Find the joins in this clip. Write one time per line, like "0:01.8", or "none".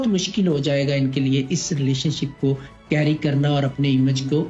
none